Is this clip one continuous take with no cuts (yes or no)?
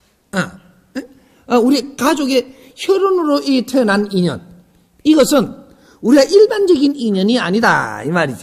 yes